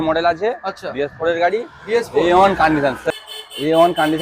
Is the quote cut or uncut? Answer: cut